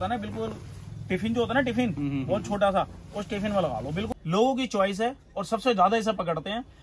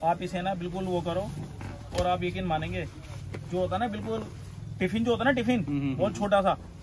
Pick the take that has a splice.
first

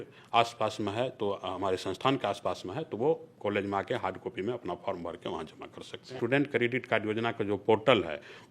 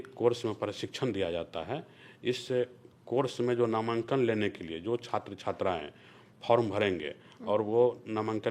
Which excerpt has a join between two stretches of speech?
first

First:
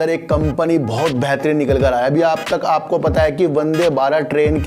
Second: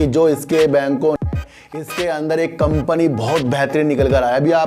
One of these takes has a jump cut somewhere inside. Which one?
second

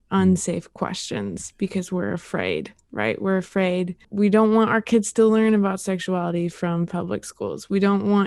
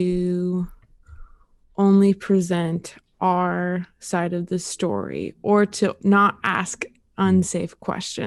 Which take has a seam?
first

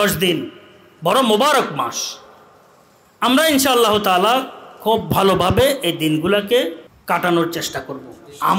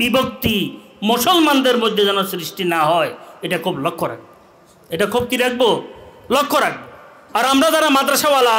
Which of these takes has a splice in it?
first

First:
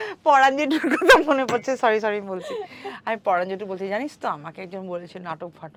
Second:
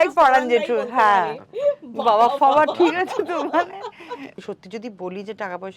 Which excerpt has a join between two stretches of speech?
second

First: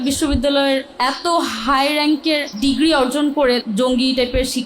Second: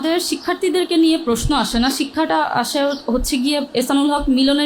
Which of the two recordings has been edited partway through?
first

